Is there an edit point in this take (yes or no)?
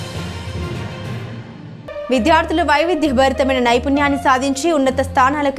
yes